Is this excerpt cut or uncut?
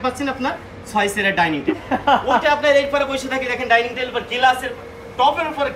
cut